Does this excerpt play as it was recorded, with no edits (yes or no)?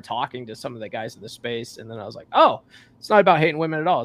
yes